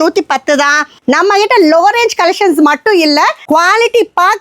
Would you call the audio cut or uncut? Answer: cut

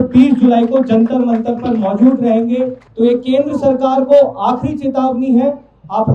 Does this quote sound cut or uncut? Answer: cut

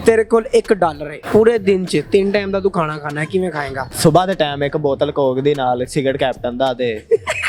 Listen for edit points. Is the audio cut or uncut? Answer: cut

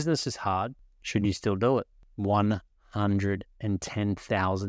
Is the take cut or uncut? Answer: uncut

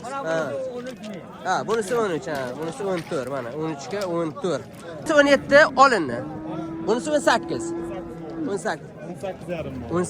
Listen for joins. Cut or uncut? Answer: cut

